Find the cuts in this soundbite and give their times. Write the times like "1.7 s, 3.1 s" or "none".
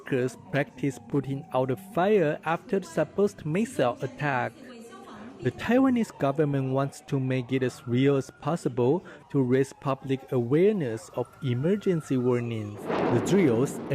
12.8 s